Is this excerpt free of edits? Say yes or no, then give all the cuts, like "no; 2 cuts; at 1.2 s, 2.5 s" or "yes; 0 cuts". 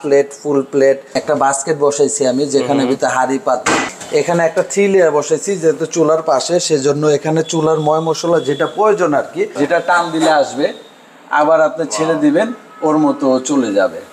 no; 3 cuts; at 1.1 s, 4.0 s, 9.5 s